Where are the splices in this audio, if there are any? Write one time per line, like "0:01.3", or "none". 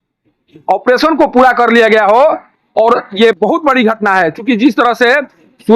none